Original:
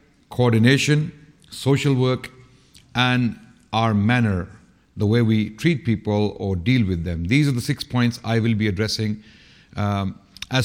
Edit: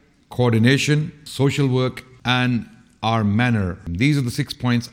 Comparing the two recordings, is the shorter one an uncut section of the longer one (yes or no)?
no